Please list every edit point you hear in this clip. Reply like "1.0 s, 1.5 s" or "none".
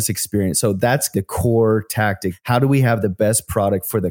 1.1 s, 2.3 s